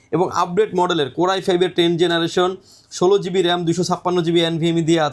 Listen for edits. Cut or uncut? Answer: uncut